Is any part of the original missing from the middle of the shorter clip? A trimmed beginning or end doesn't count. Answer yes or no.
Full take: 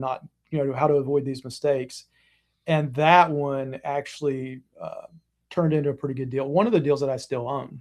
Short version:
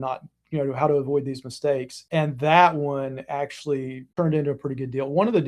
yes